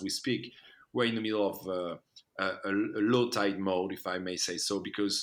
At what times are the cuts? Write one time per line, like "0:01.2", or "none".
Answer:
none